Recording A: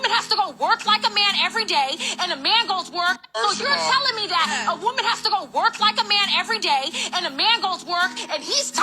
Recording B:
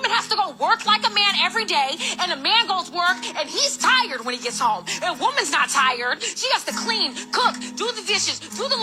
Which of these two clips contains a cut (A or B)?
A